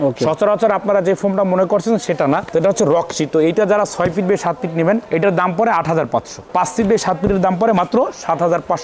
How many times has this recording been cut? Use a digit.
1